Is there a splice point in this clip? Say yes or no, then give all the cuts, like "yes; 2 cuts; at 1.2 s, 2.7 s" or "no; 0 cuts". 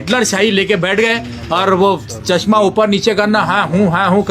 no; 0 cuts